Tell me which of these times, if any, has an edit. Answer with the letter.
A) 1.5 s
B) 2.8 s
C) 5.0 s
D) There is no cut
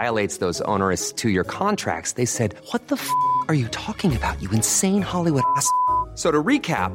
D